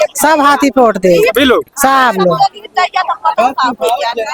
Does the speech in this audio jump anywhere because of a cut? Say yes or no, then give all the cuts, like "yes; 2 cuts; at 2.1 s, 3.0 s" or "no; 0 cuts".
no; 0 cuts